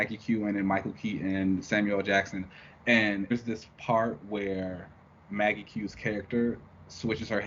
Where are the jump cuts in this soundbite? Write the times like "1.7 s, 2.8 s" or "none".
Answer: 3.3 s